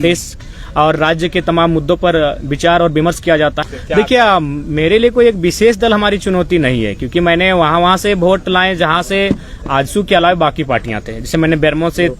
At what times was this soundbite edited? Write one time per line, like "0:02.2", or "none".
0:03.6